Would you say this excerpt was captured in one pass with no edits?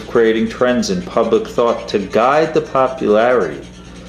yes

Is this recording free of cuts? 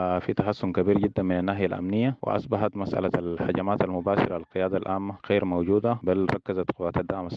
no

